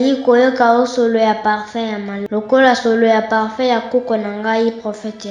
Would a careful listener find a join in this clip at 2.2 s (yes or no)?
yes